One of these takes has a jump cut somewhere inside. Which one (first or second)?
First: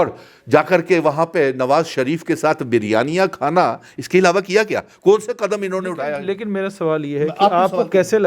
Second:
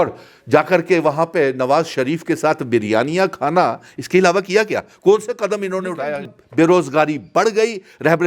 second